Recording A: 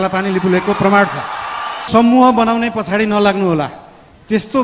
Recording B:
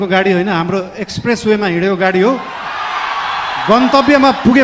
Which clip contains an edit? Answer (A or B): A